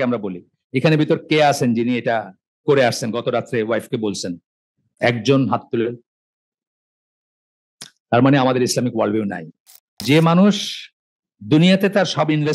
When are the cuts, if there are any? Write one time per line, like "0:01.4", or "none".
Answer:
0:10.0